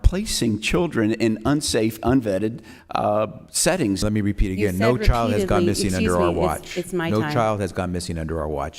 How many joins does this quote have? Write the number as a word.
one